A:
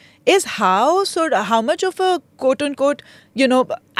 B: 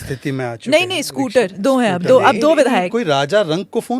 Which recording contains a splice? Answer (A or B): B